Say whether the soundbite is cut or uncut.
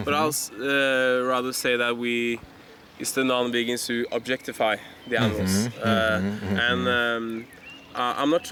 uncut